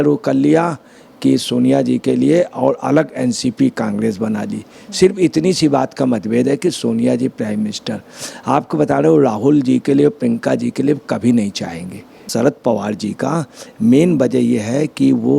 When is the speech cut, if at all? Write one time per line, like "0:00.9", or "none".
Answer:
0:12.3

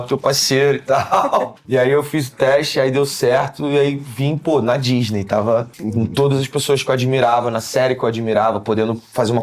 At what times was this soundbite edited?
0:01.6
0:05.8

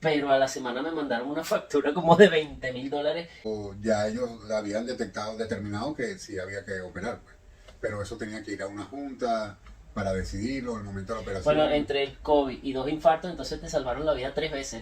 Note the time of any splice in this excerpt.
0:03.4

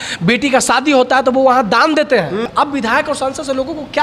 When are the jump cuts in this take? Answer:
0:02.5

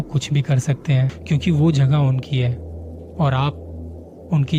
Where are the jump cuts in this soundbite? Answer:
0:01.2

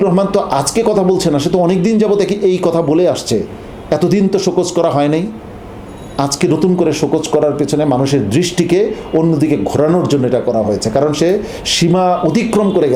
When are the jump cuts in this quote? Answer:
none

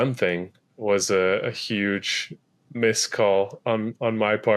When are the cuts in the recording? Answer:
none

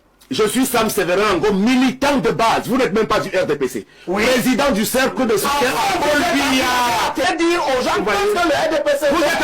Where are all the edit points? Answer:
0:07.2

